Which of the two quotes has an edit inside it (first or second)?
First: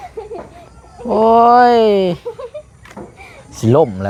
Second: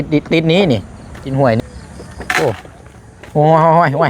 second